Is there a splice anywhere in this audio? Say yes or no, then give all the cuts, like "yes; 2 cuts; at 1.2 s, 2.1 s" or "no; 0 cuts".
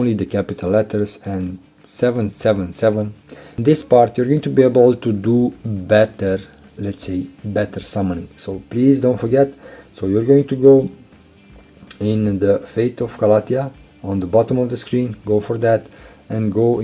yes; 1 cut; at 3.6 s